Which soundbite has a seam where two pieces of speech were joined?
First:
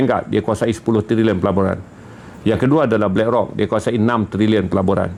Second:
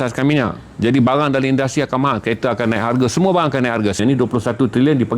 second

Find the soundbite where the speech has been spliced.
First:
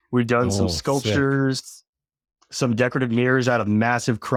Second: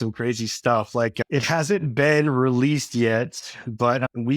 second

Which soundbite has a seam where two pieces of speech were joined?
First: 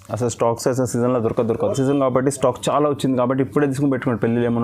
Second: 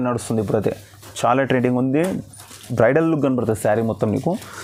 first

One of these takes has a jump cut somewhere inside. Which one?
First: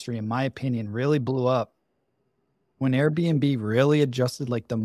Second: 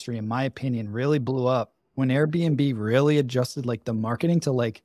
second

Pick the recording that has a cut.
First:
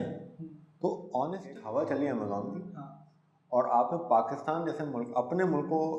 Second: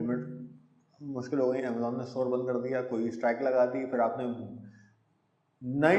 first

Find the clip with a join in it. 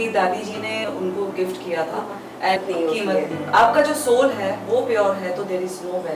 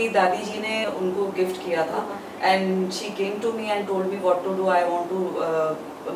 first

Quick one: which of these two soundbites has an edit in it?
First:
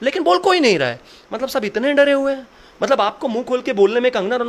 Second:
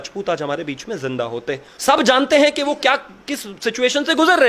second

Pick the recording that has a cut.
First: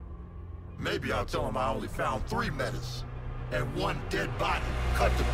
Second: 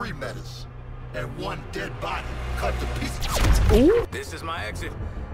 second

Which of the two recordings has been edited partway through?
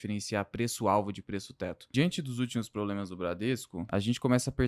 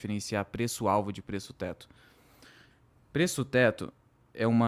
first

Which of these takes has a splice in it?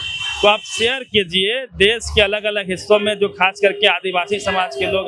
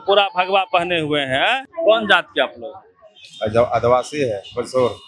second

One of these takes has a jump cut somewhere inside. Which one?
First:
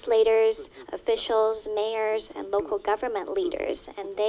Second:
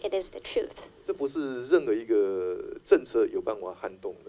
second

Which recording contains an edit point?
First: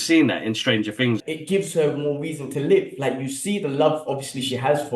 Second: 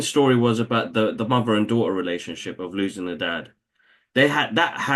first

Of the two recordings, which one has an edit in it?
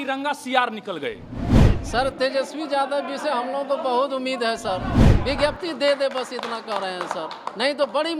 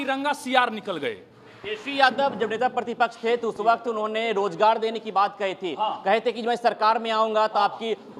first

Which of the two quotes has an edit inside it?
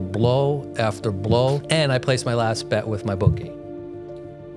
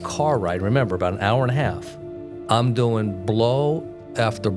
first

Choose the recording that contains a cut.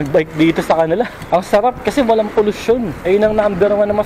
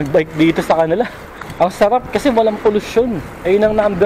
first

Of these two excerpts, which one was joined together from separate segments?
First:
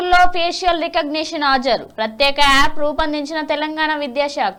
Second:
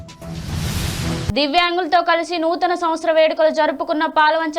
second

